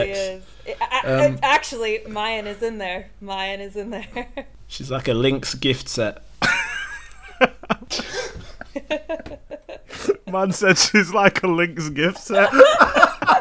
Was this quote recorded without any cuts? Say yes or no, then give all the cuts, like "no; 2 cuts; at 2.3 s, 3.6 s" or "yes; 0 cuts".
no; 3 cuts; at 4.6 s, 6.3 s, 7.9 s